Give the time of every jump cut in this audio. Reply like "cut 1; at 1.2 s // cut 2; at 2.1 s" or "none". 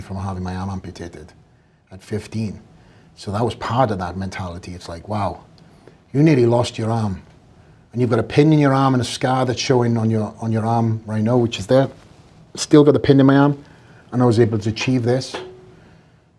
none